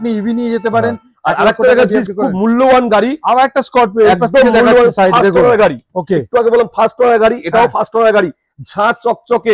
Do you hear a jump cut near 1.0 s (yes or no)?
no